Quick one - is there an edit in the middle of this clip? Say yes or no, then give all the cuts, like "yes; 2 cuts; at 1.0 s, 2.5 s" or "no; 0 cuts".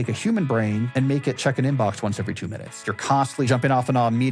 yes; 2 cuts; at 0.9 s, 2.8 s